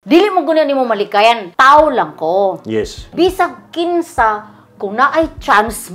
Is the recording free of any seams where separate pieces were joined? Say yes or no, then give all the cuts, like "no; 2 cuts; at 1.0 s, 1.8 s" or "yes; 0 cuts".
no; 2 cuts; at 1.5 s, 3.0 s